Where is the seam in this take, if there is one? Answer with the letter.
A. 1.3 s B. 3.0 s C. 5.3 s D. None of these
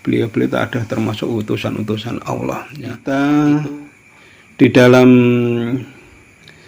B